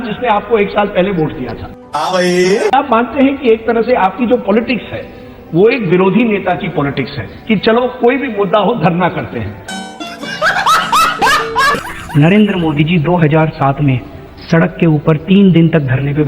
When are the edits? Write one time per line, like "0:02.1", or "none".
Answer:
0:02.7
0:11.8

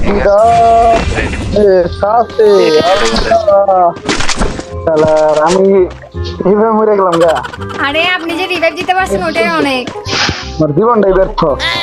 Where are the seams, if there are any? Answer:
none

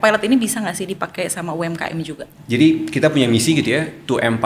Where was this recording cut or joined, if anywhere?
0:02.2

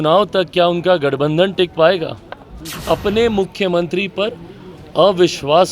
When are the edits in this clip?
0:02.8

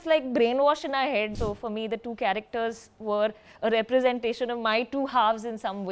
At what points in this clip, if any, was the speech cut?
0:01.3

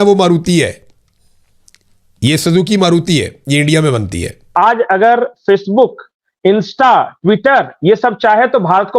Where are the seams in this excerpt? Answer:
0:04.5

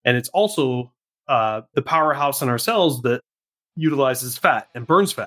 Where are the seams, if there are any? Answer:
none

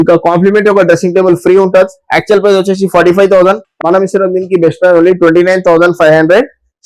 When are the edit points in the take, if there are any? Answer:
none

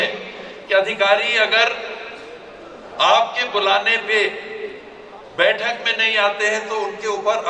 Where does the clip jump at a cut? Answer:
none

